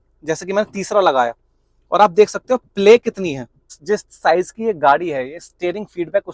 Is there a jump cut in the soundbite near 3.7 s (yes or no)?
yes